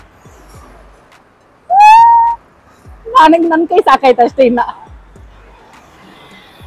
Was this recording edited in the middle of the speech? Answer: no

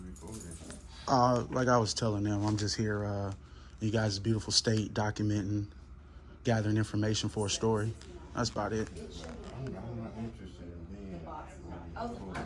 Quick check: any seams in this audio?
no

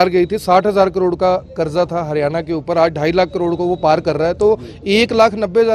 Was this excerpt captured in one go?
yes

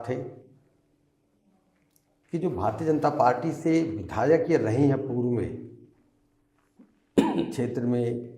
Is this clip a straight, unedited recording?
no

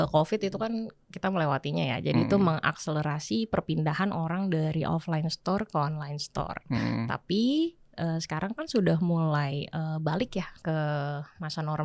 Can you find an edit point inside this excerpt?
no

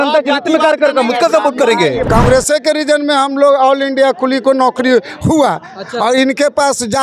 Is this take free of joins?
no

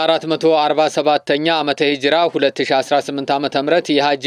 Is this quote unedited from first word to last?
yes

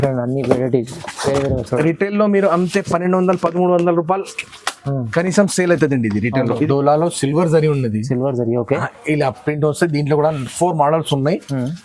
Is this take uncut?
no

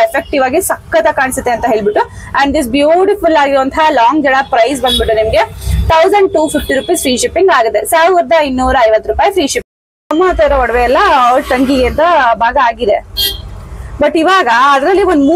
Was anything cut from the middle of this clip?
no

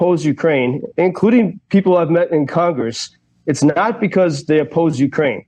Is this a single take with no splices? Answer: yes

